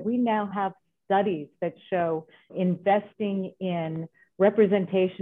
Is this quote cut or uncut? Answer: cut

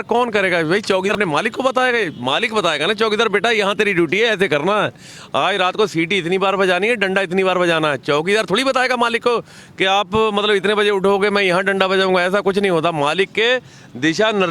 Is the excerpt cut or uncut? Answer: cut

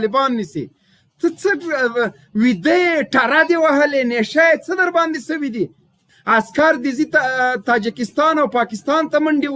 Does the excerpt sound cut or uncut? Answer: cut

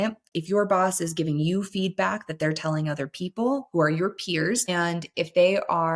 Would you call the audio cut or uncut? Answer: cut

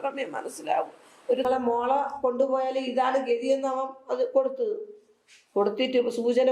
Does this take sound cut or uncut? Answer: cut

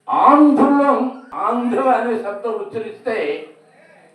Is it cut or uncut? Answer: cut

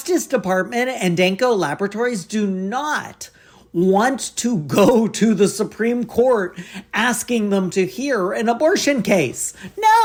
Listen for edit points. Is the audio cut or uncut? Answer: uncut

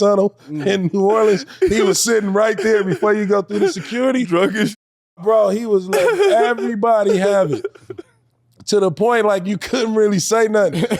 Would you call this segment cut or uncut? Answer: uncut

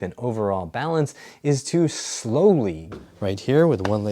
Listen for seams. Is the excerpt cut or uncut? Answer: cut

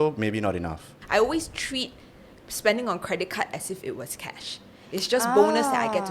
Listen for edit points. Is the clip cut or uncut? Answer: cut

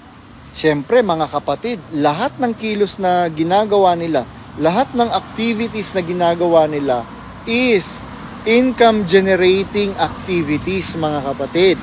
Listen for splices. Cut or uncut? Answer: uncut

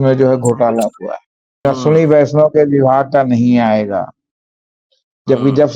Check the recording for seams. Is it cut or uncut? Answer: cut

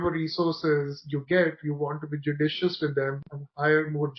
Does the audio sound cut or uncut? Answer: uncut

